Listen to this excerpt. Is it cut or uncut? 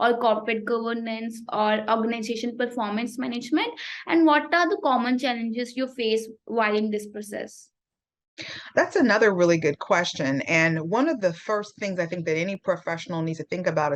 uncut